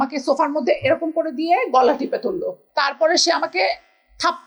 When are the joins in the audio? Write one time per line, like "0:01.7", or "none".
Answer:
none